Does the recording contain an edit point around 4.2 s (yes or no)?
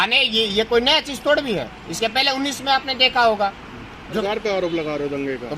yes